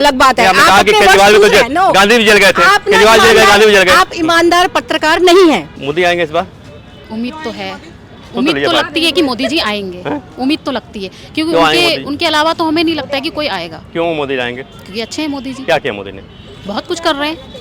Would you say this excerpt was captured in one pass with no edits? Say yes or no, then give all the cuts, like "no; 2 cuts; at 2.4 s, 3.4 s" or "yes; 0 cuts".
yes; 0 cuts